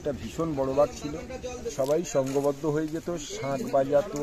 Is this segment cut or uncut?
cut